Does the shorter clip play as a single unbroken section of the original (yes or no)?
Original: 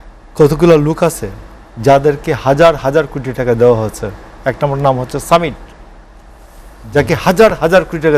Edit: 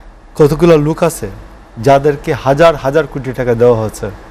yes